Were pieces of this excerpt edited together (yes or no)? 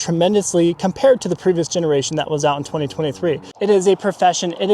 yes